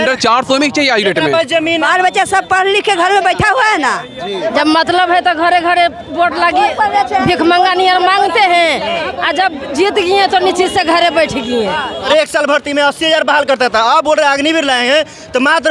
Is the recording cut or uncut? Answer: cut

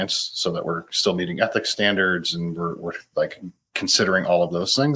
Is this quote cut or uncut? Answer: uncut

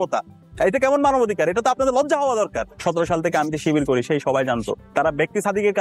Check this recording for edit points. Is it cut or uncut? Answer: cut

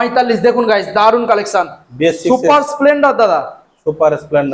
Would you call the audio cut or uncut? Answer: uncut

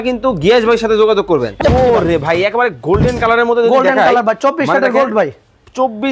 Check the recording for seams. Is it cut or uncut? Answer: cut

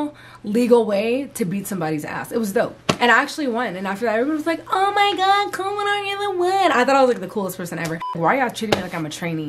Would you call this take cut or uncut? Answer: cut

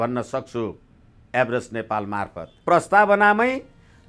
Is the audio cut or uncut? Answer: cut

